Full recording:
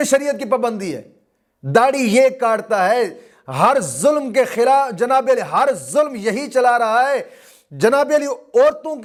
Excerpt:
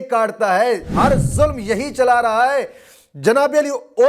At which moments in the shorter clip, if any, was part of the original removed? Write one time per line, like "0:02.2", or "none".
0:00.9